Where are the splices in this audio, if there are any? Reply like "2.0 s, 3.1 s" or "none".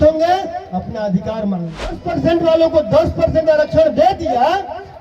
2.0 s